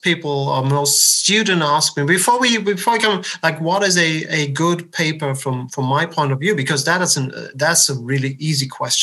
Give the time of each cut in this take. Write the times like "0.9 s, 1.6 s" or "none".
none